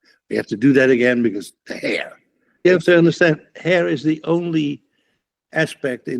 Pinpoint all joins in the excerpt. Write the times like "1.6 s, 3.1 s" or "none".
2.7 s